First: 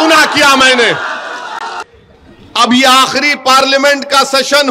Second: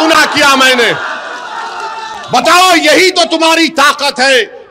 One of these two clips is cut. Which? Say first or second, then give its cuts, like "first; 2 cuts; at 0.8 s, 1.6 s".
first; 1 cut; at 1.8 s